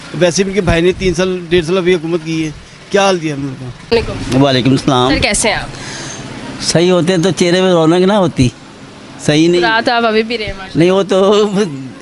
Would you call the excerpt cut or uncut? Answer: cut